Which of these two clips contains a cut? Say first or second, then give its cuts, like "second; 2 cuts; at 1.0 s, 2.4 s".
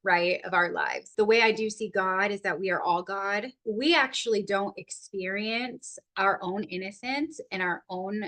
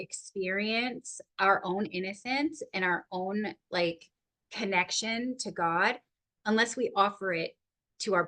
first; 2 cuts; at 1.1 s, 3.5 s